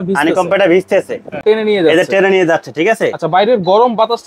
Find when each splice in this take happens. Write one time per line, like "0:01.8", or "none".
0:01.4

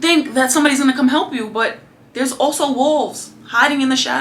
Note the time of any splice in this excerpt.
none

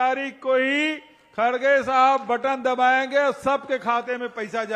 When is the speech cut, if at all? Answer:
none

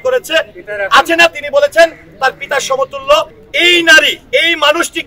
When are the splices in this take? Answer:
0:03.4

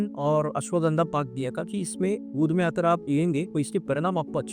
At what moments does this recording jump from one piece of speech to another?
none

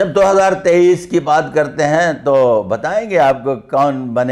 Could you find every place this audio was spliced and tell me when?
none

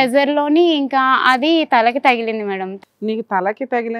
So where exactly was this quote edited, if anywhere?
0:02.7

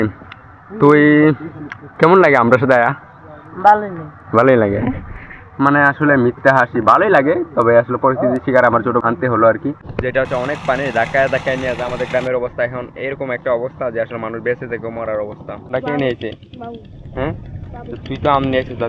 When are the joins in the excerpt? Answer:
0:09.0
0:09.9
0:15.6

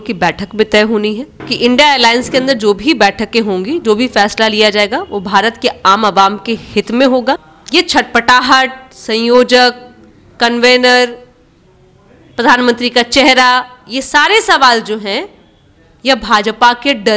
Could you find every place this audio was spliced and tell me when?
0:01.5
0:07.5

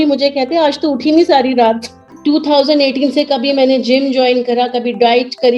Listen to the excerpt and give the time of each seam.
0:02.0

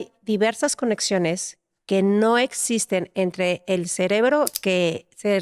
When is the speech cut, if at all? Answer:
none

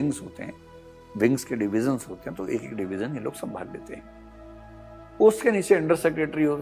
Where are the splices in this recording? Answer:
none

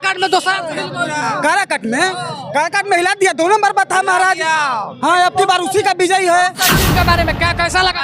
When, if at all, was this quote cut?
0:06.9

